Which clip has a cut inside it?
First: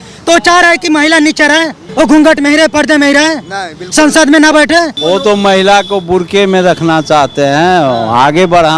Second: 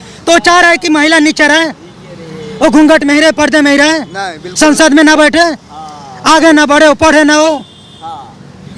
first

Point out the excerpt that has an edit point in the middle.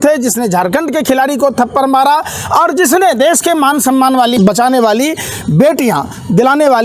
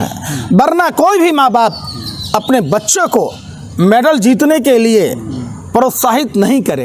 first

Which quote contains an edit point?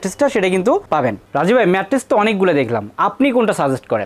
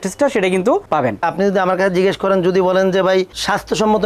second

